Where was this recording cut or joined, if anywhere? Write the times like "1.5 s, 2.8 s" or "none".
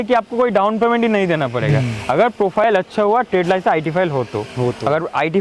none